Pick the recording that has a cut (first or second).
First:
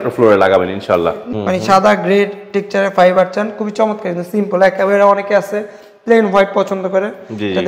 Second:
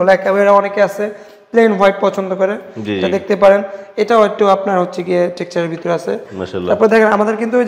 first